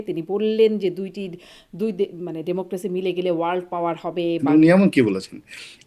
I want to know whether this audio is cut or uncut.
cut